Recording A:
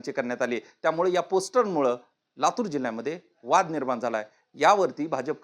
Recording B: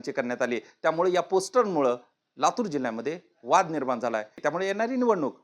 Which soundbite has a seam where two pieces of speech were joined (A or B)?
B